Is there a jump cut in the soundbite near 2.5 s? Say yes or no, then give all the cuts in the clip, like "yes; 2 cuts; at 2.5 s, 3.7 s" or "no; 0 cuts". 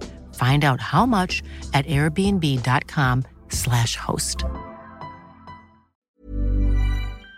no; 1 cut; at 6.1 s